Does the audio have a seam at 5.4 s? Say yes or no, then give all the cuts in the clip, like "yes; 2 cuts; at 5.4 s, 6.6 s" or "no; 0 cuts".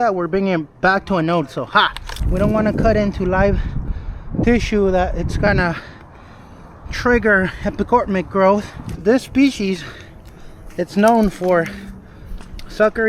no; 2 cuts; at 2.1 s, 8.9 s